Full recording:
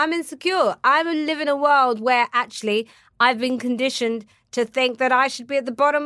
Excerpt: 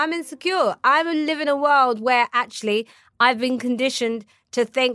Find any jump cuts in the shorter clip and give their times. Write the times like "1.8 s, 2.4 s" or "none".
none